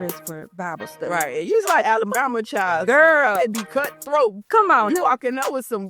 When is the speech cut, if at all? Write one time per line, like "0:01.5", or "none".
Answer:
none